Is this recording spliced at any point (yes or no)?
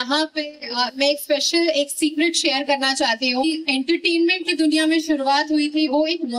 yes